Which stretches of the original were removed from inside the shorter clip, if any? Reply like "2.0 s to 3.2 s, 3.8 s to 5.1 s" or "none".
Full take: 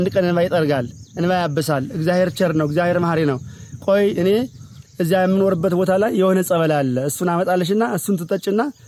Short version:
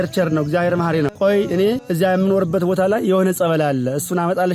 3.4 s to 3.8 s, 4.5 s to 5.0 s